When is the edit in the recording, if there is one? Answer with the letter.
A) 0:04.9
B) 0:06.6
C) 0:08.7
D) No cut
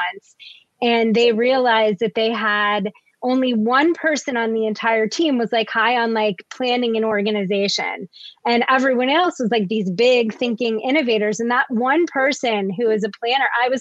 D